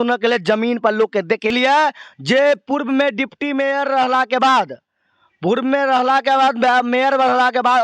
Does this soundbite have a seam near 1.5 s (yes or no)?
yes